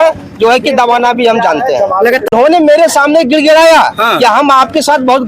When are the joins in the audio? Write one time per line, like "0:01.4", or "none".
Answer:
0:02.3